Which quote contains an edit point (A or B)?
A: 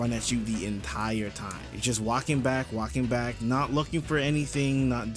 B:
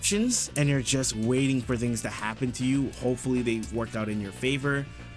A